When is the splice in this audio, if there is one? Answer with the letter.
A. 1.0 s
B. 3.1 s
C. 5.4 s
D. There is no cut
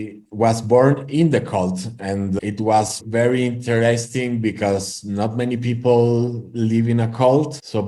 D